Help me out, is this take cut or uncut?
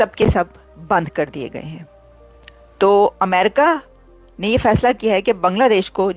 uncut